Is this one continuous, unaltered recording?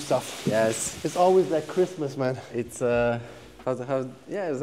yes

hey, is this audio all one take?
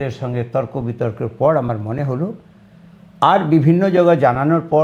yes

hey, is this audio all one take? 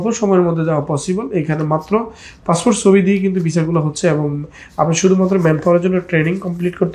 yes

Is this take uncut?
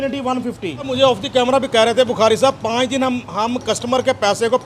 no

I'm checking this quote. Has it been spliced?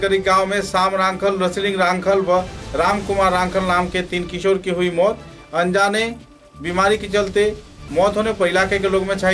no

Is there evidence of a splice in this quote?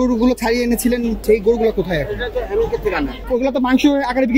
yes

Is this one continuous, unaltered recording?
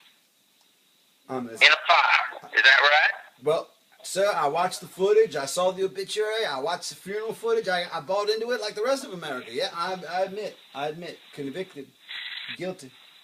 yes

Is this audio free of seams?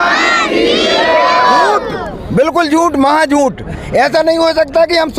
yes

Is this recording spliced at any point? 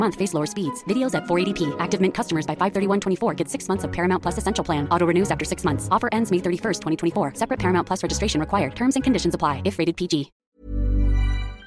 yes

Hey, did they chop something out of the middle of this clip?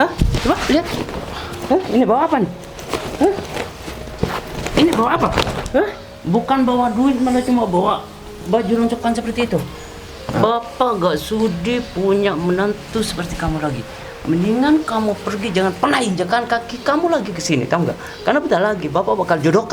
no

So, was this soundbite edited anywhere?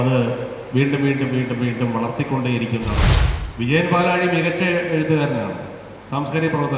yes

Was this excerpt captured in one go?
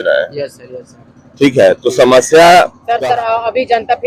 no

